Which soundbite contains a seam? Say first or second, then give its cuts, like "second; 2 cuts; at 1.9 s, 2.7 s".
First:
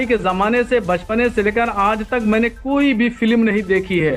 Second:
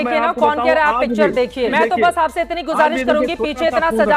second; 1 cut; at 1.7 s